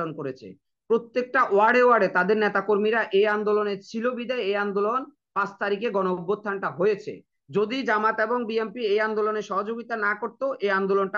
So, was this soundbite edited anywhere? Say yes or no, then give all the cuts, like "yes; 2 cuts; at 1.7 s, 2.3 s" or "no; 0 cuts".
no; 0 cuts